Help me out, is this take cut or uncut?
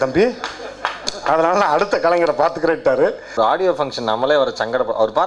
cut